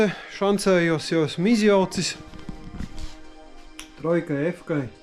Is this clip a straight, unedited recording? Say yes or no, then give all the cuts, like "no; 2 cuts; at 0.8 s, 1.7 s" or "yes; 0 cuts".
yes; 0 cuts